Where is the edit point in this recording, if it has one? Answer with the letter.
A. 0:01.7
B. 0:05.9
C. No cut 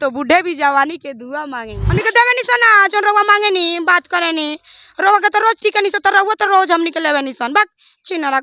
A